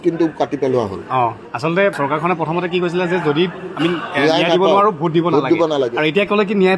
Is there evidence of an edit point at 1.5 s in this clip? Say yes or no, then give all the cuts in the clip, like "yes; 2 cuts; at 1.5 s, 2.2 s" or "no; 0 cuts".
yes; 1 cut; at 1.5 s